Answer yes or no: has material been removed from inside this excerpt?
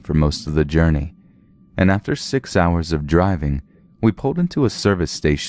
yes